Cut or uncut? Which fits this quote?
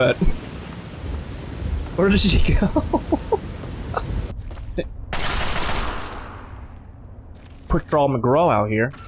cut